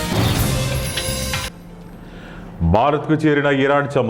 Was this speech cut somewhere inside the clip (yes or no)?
no